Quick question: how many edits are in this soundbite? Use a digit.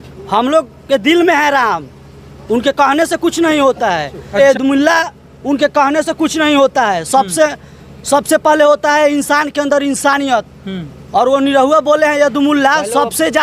1